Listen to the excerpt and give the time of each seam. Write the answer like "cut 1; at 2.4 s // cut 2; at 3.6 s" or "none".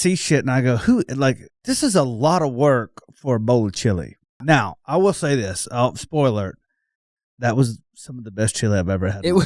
cut 1; at 1.5 s // cut 2; at 4.4 s